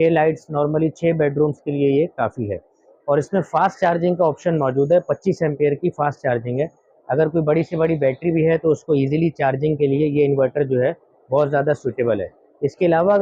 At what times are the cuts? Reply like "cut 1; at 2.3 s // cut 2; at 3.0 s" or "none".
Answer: none

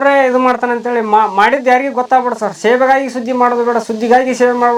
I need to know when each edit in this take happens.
none

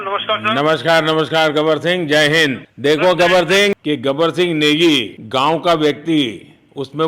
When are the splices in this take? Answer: cut 1; at 3.8 s

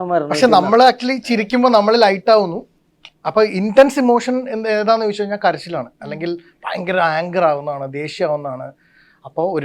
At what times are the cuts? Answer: none

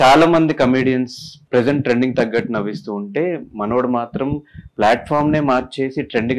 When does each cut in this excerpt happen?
cut 1; at 1.4 s

